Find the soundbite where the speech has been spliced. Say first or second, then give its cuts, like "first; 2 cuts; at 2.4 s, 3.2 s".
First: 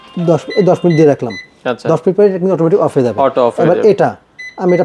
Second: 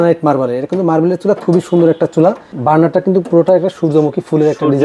second; 1 cut; at 2.5 s